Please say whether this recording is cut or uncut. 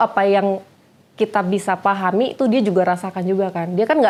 uncut